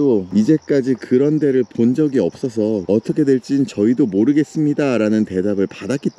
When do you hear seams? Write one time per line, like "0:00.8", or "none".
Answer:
0:02.8